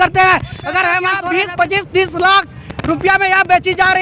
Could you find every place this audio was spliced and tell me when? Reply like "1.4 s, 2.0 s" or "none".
1.1 s